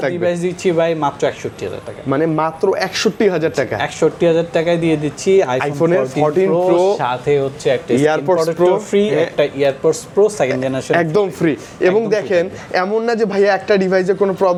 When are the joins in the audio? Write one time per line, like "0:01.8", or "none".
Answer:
none